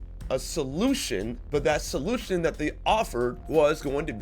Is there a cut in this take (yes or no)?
yes